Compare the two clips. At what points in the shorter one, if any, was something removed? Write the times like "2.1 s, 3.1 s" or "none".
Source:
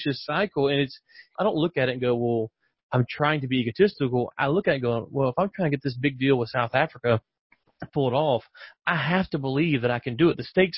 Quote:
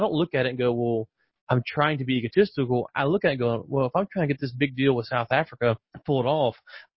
5.9 s

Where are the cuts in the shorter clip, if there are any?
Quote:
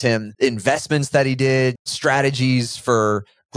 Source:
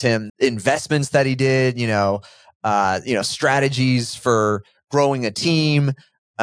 1.8 s

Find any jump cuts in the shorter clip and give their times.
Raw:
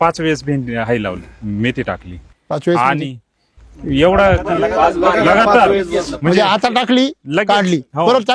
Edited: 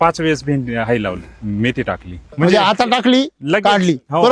2.3 s

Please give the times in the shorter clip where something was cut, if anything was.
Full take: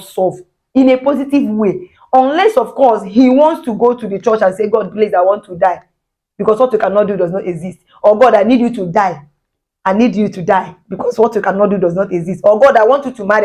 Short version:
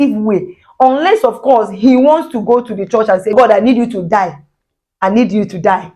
3.3 s

